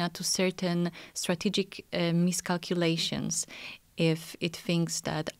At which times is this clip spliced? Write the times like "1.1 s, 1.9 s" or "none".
none